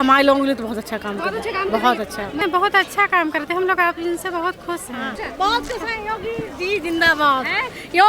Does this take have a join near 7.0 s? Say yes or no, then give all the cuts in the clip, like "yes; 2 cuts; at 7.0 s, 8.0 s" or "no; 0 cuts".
no; 2 cuts; at 2.4 s, 5.2 s